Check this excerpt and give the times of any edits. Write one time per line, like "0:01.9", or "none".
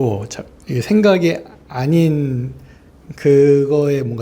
none